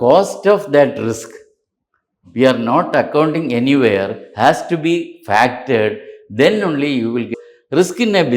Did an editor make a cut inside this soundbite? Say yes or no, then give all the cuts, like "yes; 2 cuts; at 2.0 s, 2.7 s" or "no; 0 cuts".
yes; 1 cut; at 7.4 s